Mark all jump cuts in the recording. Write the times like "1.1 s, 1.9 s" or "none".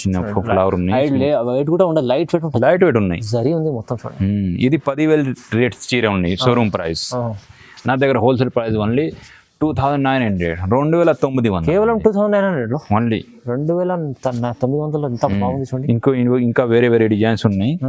none